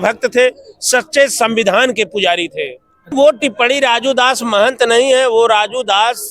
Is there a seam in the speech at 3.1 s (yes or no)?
yes